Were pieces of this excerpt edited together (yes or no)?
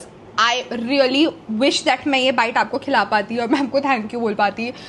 no